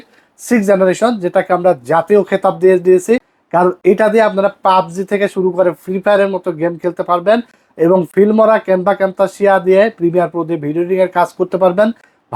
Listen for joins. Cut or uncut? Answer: uncut